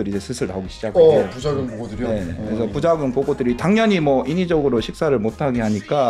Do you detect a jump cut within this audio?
no; 0 cuts

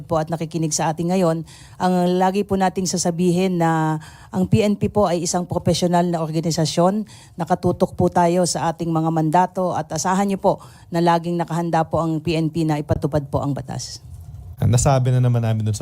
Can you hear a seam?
yes; 1 cut; at 14.4 s

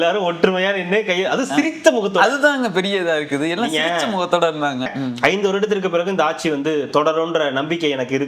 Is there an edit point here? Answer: yes; 1 cut; at 4.9 s

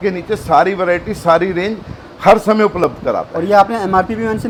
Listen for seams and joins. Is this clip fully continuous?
yes; 0 cuts

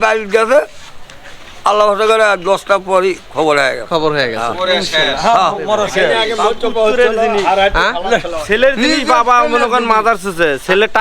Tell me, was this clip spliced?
no; 0 cuts

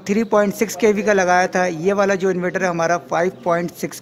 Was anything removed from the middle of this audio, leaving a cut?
no; 0 cuts

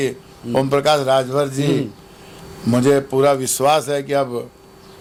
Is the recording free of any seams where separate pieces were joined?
yes; 0 cuts

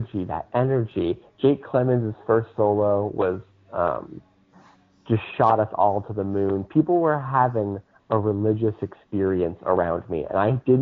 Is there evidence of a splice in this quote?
no; 0 cuts

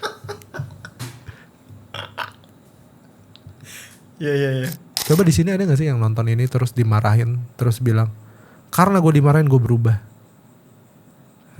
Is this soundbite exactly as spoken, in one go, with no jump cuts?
no; 1 cut; at 4.9 s

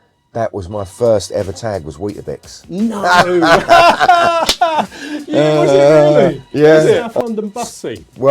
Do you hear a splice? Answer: yes; 1 cut; at 7.1 s

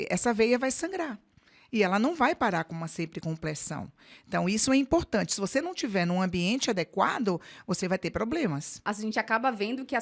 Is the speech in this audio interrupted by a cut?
yes; 1 cut; at 8.7 s

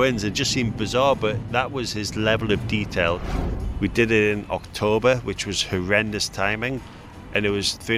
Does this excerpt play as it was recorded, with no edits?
no; 2 cuts; at 3.2 s, 6.8 s

